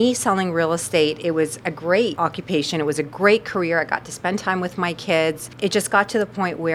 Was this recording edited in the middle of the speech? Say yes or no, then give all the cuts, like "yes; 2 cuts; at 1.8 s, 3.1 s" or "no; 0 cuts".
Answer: yes; 2 cuts; at 2.1 s, 5.5 s